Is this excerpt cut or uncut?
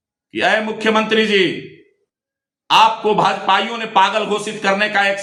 uncut